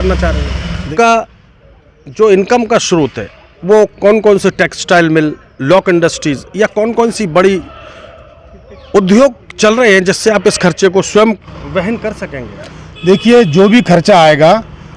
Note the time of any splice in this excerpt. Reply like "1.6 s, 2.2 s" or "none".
0.9 s, 11.4 s